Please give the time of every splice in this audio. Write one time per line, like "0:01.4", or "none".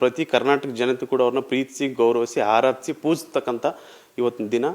none